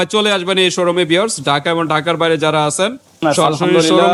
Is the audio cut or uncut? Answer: uncut